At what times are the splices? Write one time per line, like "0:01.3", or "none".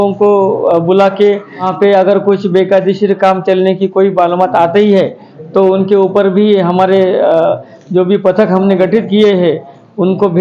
0:01.7